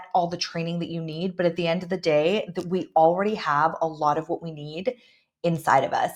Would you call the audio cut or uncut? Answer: uncut